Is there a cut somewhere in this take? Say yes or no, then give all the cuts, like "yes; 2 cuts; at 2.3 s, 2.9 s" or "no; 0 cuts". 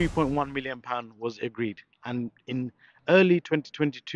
no; 0 cuts